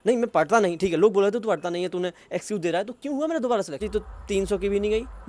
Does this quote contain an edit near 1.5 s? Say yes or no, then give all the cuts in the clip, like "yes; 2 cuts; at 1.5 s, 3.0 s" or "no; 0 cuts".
no; 1 cut; at 3.8 s